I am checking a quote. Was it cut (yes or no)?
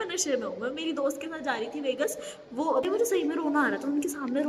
yes